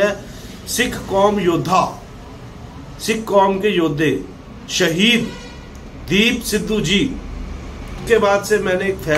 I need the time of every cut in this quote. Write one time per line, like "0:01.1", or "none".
0:08.0